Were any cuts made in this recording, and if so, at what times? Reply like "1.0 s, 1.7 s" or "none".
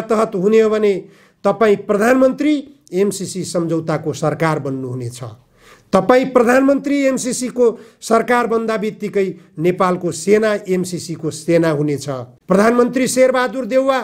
12.3 s